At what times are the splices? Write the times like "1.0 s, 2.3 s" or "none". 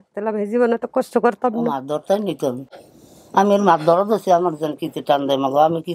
none